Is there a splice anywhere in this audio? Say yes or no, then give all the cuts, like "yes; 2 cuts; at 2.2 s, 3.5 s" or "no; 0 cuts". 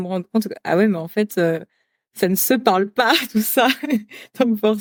no; 0 cuts